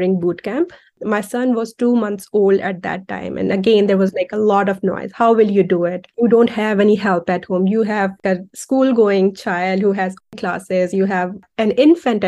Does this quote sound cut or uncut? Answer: uncut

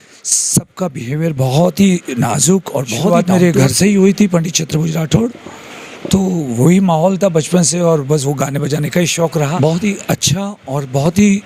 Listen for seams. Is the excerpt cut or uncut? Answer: cut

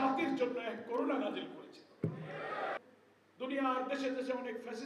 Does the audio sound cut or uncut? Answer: cut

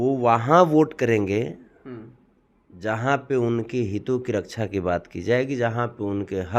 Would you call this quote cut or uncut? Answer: uncut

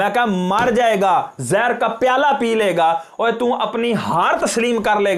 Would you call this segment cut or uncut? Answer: uncut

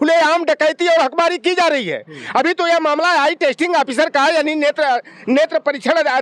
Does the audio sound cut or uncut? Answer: uncut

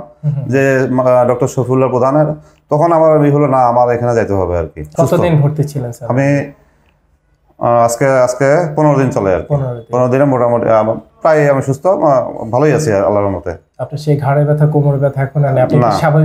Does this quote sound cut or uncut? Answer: cut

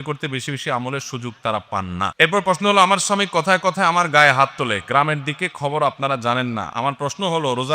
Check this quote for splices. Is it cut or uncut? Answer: cut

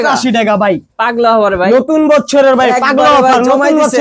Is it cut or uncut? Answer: uncut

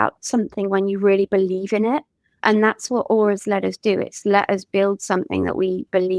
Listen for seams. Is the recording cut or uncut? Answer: cut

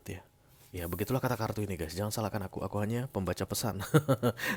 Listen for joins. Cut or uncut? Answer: uncut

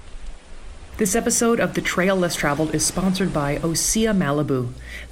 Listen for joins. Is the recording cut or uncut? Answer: cut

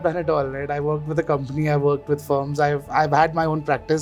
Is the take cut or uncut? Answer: uncut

